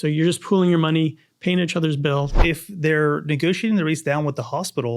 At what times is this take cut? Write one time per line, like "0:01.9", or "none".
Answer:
0:02.4